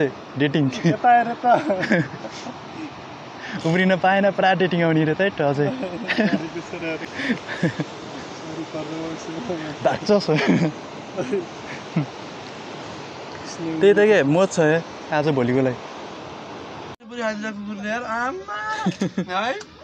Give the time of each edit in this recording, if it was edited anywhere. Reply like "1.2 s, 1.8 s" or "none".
7.0 s, 17.0 s

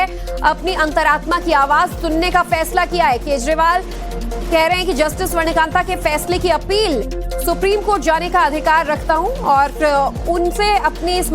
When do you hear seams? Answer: 1.5 s

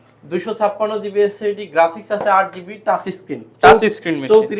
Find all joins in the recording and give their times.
none

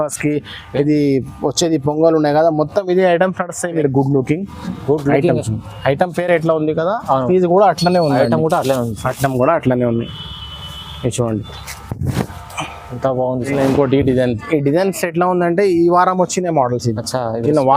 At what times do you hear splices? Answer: 3.8 s, 13.4 s

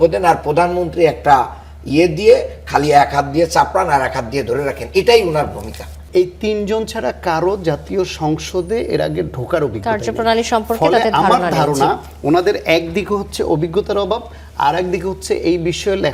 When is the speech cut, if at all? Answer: 6.0 s

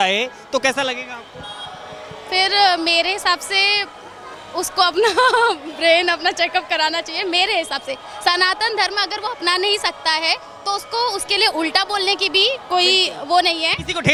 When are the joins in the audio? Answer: none

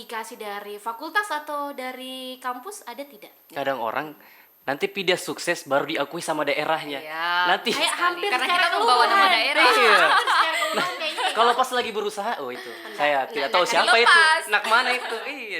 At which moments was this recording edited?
3.5 s

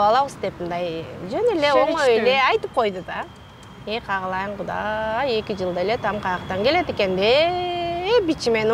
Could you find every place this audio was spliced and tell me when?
none

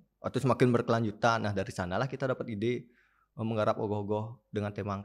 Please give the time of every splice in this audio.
none

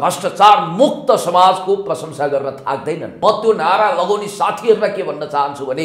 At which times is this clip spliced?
3.1 s

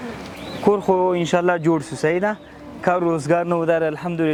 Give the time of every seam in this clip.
none

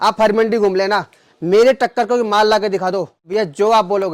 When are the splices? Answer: 3.1 s

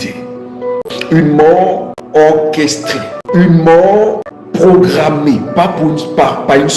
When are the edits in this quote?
0.8 s, 1.9 s, 3.2 s, 4.7 s

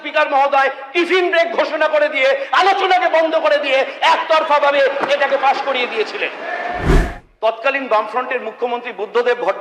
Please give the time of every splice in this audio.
7.0 s

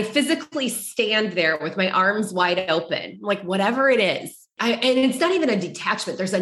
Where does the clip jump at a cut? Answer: 4.5 s

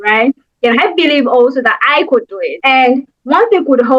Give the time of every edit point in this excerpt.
2.5 s

